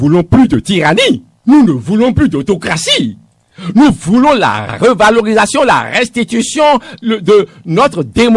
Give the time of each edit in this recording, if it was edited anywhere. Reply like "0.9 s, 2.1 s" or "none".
none